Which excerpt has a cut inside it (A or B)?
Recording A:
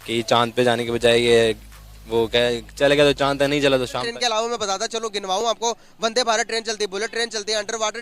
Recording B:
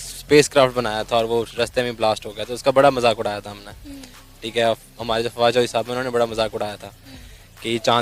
A